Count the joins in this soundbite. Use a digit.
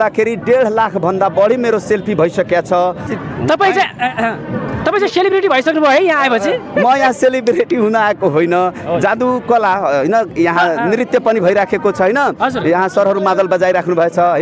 1